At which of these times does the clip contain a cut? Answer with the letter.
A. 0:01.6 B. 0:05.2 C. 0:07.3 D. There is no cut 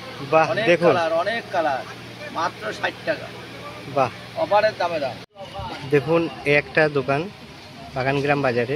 B